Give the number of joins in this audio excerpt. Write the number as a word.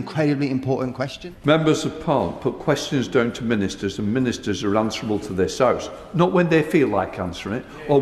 one